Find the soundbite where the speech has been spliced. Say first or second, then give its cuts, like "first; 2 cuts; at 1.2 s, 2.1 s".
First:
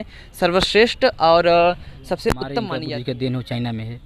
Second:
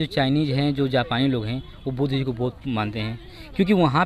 first; 1 cut; at 2.7 s